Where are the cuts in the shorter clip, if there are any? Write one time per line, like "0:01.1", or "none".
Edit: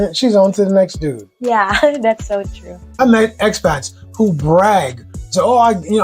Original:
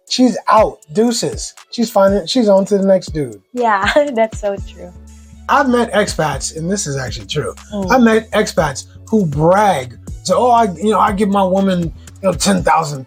0:03.0